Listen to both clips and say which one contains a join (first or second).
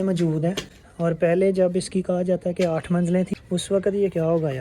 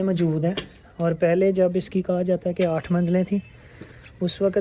first